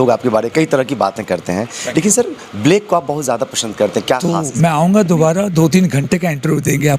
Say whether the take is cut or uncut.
cut